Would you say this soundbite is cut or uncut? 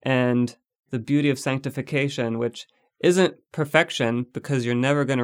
uncut